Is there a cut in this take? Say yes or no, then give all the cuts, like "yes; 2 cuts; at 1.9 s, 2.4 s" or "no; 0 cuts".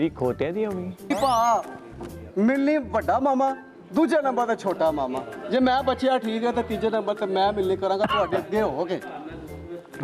yes; 1 cut; at 1.1 s